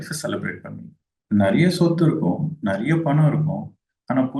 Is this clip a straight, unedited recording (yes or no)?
yes